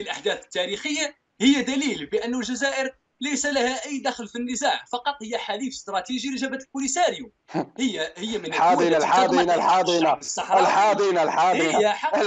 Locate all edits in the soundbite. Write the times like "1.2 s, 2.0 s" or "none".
none